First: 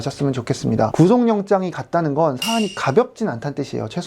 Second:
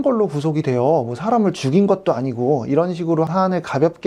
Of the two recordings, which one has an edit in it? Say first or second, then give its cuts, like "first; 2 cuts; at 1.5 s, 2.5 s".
first; 1 cut; at 0.9 s